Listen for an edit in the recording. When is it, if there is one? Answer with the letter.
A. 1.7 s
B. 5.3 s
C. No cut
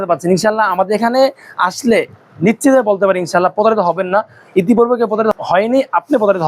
B